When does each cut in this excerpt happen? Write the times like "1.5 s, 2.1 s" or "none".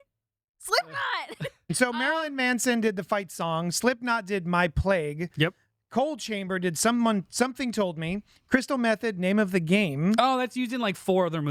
1.7 s